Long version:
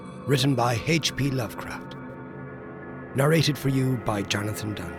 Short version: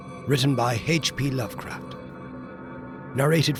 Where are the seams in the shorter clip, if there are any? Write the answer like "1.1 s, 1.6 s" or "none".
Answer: none